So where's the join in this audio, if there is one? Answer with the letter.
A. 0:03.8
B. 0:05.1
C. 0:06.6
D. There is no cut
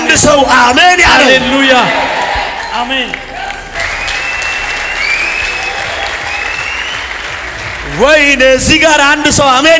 A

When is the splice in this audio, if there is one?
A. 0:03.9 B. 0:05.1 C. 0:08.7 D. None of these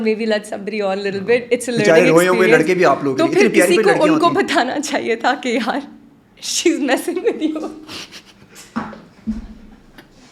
D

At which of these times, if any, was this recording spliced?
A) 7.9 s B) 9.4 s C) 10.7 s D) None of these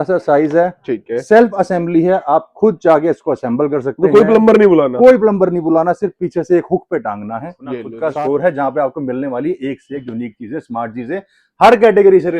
A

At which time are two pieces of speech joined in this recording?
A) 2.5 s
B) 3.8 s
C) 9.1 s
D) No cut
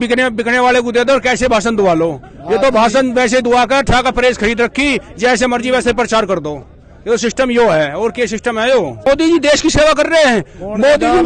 C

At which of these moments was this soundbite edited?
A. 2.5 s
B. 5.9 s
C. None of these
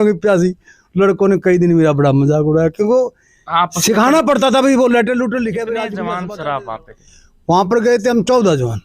B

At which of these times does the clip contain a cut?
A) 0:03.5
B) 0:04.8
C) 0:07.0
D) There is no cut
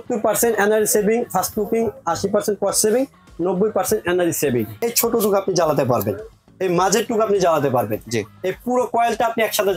B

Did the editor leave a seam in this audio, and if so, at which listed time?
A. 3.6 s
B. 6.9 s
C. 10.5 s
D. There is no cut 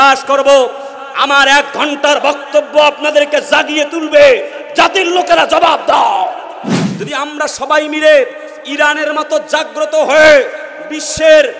B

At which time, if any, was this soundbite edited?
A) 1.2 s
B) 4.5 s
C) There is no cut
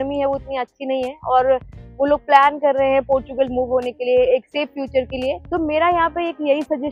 C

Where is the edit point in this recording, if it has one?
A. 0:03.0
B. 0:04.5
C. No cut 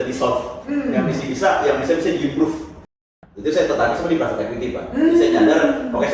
A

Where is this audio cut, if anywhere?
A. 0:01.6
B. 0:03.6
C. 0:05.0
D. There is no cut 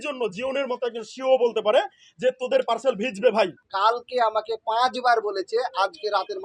B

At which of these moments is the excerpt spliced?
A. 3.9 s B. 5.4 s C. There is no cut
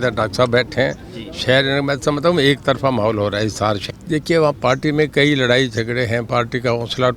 A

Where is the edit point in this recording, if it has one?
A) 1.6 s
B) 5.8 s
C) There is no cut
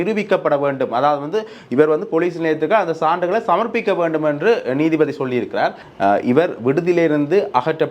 B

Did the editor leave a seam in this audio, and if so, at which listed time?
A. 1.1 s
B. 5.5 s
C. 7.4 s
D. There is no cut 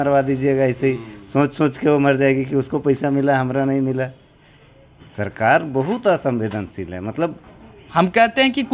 C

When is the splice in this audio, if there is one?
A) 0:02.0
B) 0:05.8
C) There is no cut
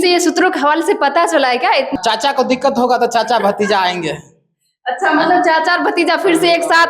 A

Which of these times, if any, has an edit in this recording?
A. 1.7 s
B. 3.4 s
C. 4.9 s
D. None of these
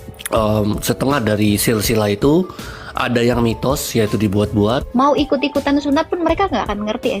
C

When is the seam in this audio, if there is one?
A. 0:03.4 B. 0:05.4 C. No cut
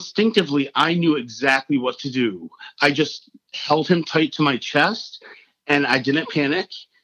C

